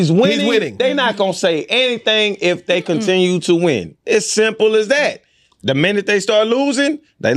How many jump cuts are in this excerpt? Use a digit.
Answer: 0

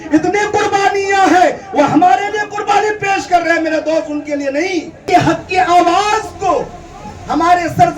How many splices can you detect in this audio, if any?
1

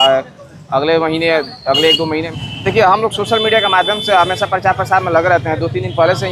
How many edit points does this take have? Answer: 1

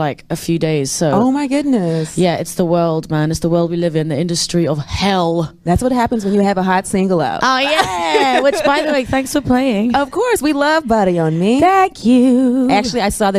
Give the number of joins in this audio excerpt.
0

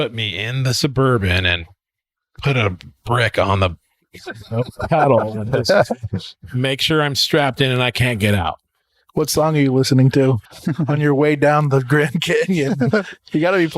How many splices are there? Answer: 1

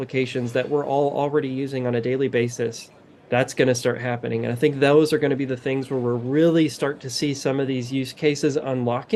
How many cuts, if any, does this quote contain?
0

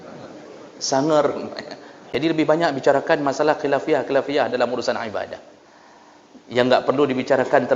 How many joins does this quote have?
1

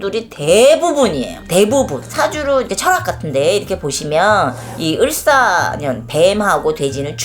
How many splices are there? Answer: 1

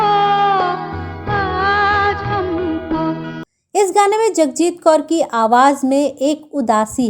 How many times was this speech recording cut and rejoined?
1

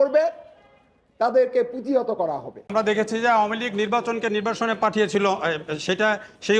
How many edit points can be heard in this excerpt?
1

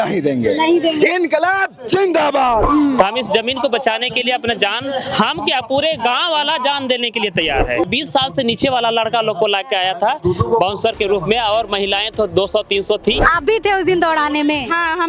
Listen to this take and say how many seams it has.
3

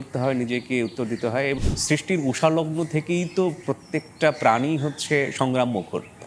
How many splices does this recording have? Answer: 1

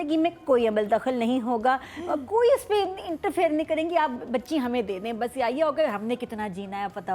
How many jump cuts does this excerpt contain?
0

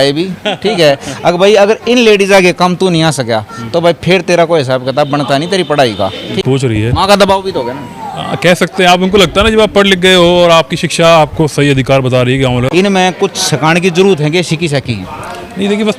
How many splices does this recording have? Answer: 2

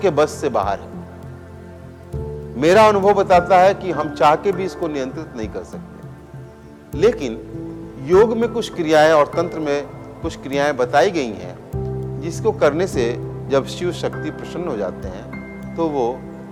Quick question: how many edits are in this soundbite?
0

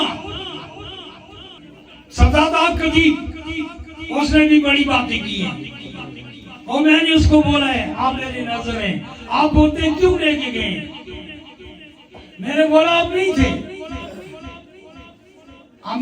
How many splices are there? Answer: 1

